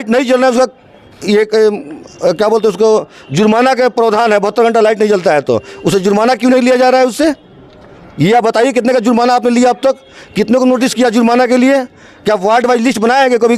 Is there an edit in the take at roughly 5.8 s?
no; 0 cuts

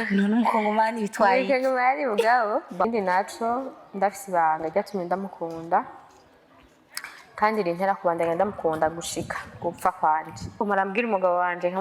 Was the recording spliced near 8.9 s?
no; 2 cuts; at 2.9 s, 10.6 s

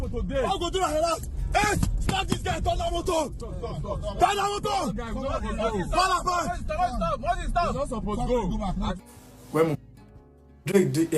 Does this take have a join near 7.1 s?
no; 1 cut; at 8.9 s

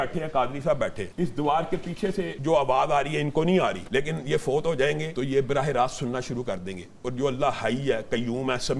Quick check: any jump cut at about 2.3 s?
yes; 4 cuts; at 1.0 s, 2.3 s, 3.8 s, 5.1 s

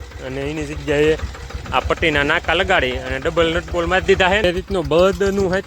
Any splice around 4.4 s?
yes; 1 cut; at 4.4 s

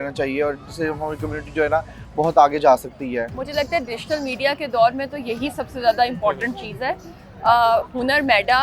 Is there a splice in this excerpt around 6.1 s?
no; 1 cut; at 3.4 s

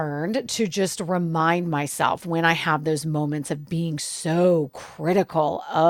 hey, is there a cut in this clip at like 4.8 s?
no; 0 cuts

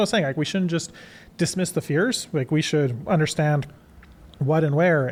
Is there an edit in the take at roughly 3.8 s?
no; 0 cuts

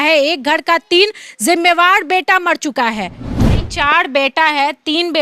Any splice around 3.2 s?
yes; 1 cut; at 3.2 s

